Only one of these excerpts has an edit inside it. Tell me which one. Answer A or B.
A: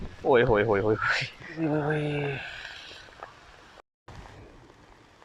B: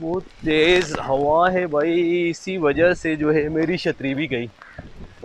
A